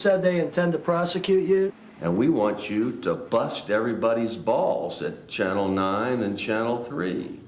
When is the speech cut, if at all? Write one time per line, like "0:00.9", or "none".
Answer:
0:01.8
0:03.2